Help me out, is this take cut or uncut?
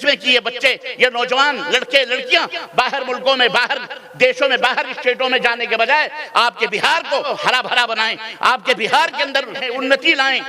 cut